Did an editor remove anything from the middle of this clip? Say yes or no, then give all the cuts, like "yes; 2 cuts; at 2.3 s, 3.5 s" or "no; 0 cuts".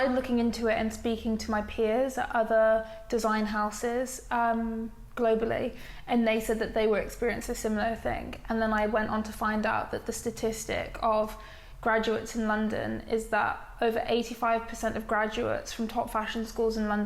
no; 0 cuts